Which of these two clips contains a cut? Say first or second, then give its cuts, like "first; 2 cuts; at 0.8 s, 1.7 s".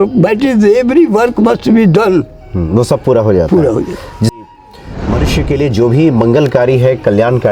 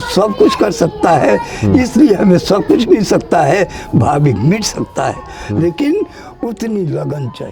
first; 1 cut; at 4.4 s